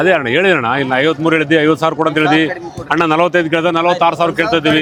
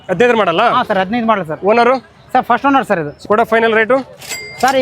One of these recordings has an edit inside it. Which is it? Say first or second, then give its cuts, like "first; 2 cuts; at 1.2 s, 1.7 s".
second; 1 cut; at 3.1 s